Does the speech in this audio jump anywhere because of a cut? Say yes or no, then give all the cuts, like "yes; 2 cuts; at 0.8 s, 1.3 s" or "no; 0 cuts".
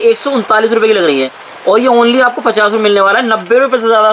no; 0 cuts